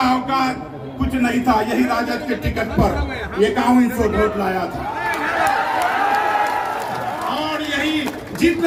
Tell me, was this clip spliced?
no; 0 cuts

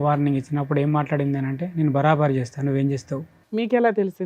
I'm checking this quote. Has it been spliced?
yes; 1 cut; at 3.3 s

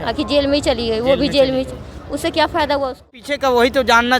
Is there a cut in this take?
yes; 1 cut; at 3.2 s

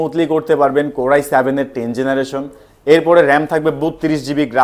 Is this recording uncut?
yes; 0 cuts

